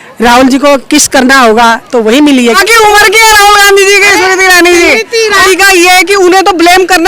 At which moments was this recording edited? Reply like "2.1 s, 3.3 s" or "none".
2.6 s, 5.4 s